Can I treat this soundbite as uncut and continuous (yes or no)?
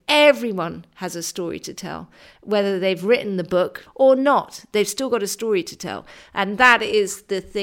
no